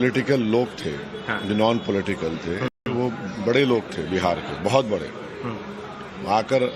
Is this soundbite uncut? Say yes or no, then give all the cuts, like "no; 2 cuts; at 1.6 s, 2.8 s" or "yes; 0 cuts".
yes; 0 cuts